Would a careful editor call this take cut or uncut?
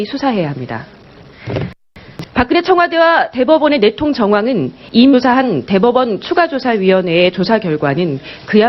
uncut